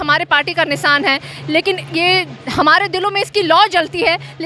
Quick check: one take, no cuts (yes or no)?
yes